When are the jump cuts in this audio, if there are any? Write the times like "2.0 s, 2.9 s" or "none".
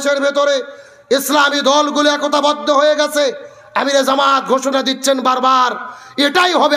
none